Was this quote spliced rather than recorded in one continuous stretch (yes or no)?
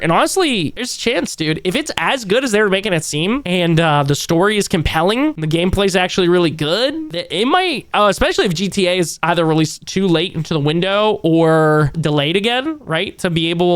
yes